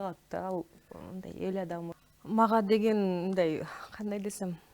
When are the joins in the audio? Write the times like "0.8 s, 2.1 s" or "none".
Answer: 1.9 s